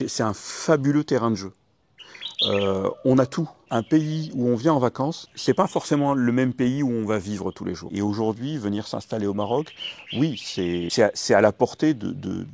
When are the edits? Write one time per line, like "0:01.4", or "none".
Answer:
0:03.7
0:07.8